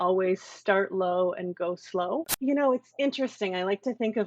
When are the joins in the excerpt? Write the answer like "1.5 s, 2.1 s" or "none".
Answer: 2.3 s